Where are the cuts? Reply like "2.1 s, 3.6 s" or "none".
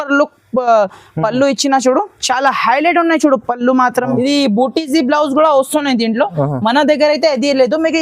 4.0 s